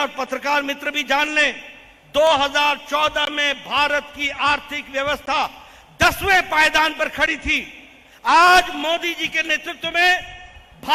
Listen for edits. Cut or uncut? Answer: uncut